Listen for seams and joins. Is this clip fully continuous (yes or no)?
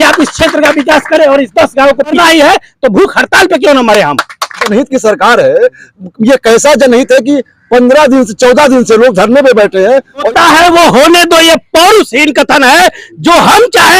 no